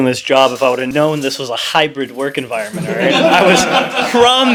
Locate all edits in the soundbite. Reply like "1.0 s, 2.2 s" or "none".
none